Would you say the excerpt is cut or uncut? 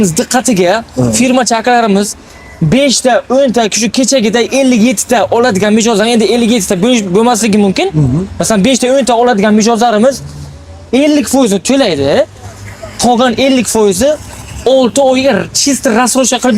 uncut